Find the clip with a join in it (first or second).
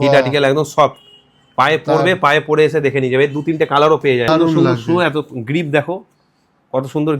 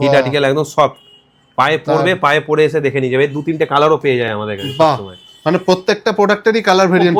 first